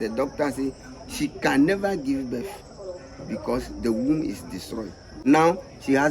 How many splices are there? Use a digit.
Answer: 1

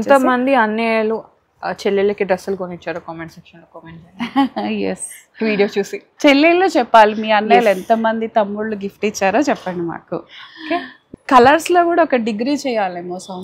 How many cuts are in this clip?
1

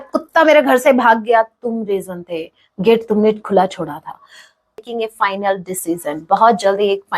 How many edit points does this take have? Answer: 1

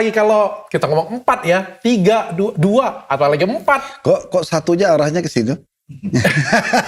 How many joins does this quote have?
0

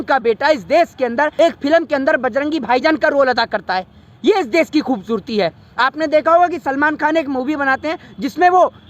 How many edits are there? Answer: 1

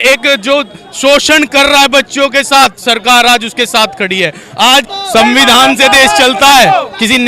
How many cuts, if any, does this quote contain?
1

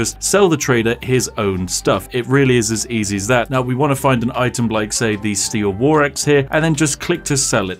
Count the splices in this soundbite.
0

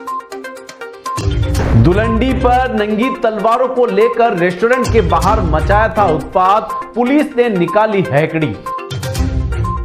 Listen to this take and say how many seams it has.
1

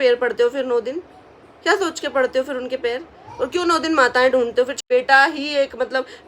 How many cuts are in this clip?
1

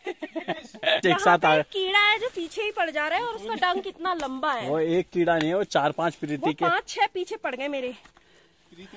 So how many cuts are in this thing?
1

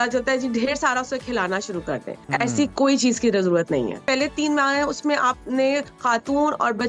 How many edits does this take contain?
3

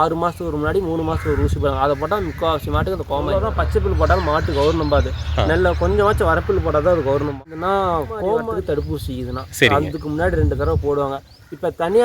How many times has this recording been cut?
3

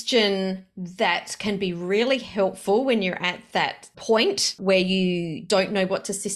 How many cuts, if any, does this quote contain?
3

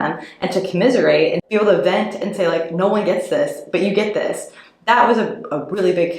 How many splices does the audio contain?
1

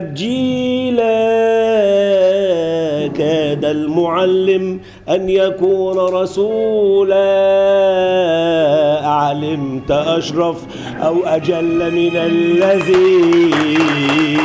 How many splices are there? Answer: 0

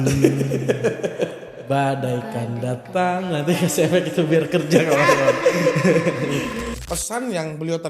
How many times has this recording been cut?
1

